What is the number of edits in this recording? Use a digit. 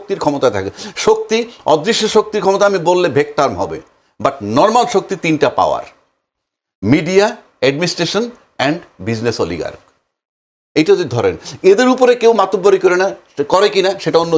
0